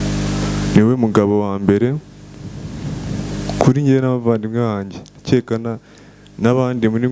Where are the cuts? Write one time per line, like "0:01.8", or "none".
none